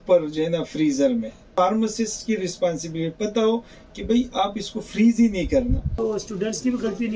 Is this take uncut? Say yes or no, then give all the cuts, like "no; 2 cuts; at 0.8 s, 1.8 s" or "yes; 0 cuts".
no; 2 cuts; at 1.5 s, 5.9 s